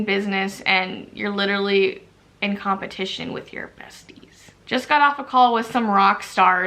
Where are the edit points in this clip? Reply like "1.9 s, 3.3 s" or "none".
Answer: 4.6 s